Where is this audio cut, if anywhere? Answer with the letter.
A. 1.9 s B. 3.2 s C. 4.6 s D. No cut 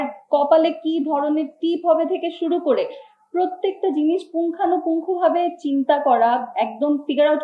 D